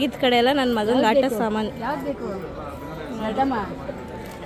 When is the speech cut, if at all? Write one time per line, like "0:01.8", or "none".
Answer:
none